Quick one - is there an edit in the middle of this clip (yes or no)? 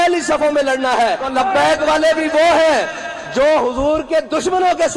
yes